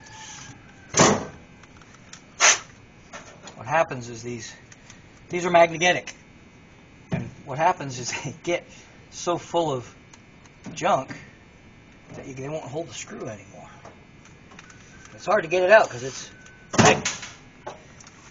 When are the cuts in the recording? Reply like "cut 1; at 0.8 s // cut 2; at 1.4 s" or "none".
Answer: none